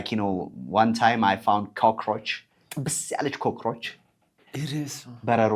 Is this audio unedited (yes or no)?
yes